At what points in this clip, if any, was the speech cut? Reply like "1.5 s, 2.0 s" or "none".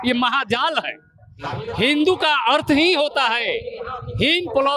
none